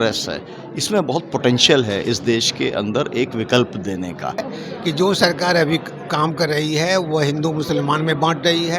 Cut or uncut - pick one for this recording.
cut